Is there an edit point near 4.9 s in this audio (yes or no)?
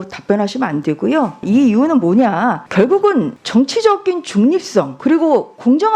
yes